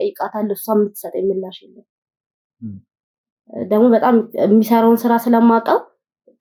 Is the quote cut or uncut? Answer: uncut